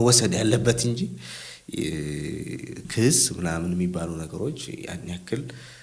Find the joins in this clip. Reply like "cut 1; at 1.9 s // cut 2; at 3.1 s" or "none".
none